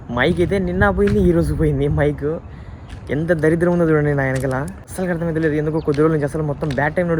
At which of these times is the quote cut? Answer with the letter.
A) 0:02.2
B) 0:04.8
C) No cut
B